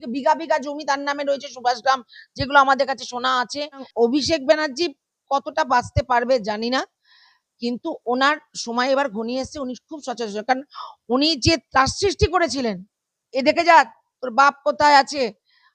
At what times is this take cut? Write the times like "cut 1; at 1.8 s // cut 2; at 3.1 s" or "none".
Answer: cut 1; at 3.9 s